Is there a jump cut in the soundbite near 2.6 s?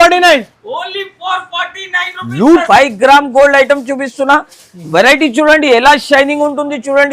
yes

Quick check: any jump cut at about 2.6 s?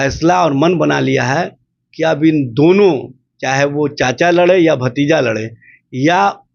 no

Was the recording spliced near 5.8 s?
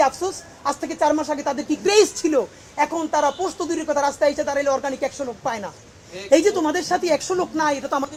no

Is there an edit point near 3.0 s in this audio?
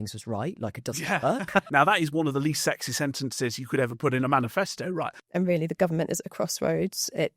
no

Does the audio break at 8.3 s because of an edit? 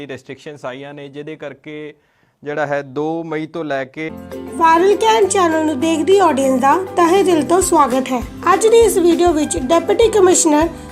no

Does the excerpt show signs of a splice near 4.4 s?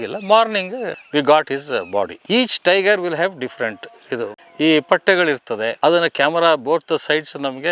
yes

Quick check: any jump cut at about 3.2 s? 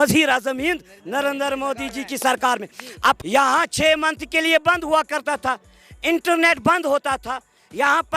yes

